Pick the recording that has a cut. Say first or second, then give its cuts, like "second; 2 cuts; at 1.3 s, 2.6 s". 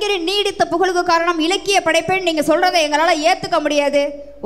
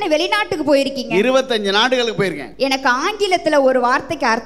second; 1 cut; at 2.4 s